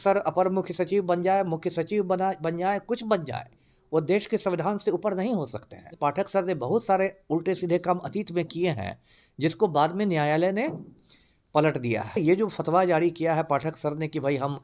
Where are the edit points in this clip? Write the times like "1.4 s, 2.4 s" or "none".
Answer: 5.9 s, 12.1 s